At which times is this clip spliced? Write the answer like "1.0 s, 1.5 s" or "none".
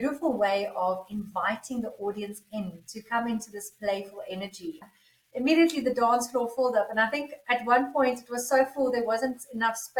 4.8 s